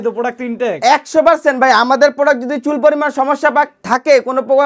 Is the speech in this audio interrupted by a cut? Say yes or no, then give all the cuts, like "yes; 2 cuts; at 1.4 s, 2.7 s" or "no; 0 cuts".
no; 0 cuts